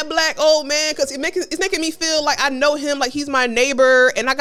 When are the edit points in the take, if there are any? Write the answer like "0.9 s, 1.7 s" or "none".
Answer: none